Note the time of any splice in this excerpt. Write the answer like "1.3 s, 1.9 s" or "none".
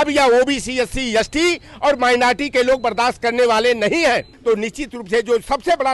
4.3 s